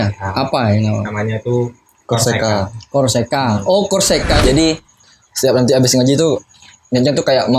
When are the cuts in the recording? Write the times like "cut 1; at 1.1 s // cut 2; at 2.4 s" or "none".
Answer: cut 1; at 4.4 s